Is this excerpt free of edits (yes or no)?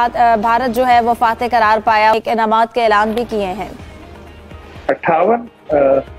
no